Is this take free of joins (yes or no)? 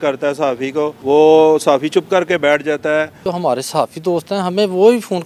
no